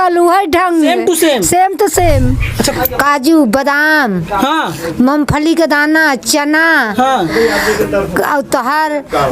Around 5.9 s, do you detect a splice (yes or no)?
no